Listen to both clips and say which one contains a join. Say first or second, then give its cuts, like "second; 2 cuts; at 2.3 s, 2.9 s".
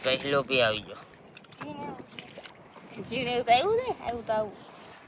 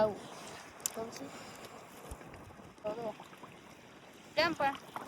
second; 1 cut; at 2.9 s